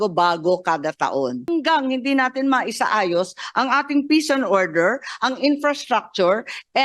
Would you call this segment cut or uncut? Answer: cut